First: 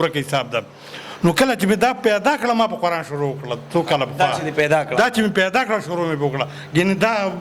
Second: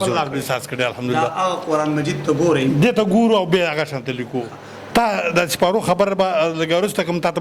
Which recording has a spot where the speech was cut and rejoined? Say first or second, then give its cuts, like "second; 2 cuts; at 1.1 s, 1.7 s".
second; 1 cut; at 4.7 s